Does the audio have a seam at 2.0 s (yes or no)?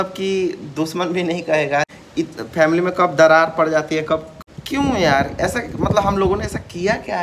yes